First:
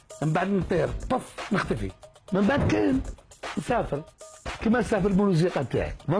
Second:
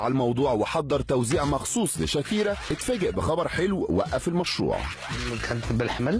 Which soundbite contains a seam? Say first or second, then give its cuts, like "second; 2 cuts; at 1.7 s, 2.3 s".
second; 1 cut; at 1.3 s